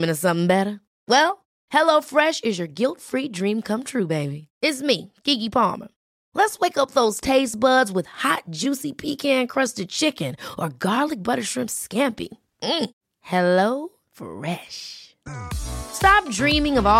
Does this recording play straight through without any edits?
yes; 0 cuts

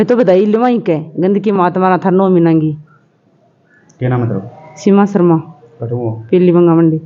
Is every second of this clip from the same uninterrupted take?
yes; 0 cuts

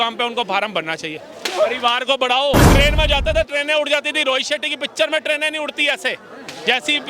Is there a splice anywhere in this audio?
yes; 1 cut; at 2.6 s

